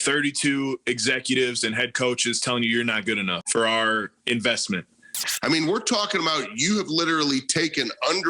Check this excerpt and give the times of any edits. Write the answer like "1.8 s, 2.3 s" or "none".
3.4 s, 5.2 s

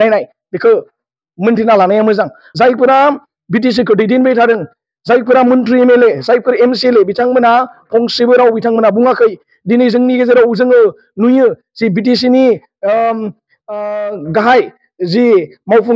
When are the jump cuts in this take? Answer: 2.4 s

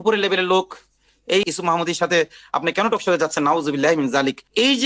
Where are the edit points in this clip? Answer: 1.4 s

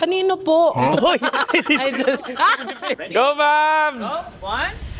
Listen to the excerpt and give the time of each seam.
3.0 s

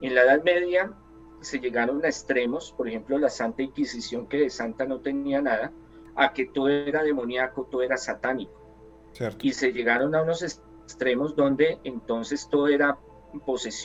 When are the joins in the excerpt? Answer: none

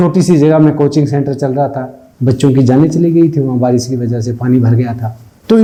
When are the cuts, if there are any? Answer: none

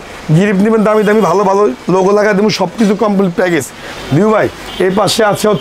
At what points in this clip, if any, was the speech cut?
3.9 s

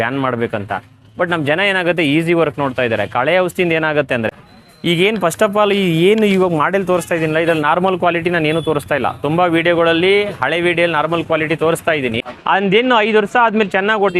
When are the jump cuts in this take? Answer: 4.3 s, 12.2 s

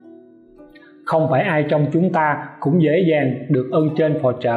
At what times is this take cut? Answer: 1.0 s

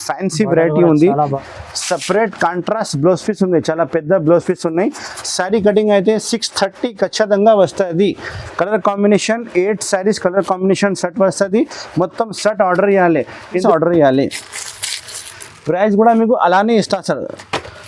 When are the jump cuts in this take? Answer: 1.4 s, 13.5 s

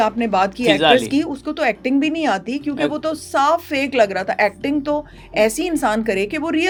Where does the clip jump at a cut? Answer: none

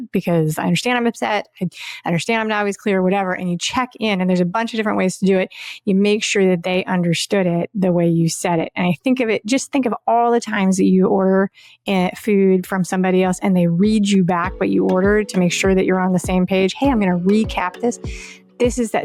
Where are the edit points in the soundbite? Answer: none

